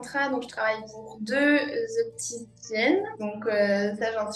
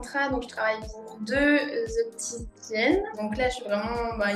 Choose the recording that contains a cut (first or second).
second